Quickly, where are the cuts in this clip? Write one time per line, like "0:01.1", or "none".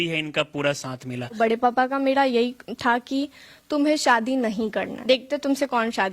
0:01.4
0:04.9